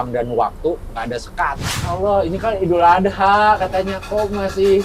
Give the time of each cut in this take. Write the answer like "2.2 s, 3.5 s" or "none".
1.7 s